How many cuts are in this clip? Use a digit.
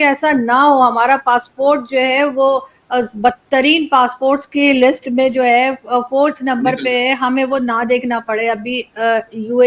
0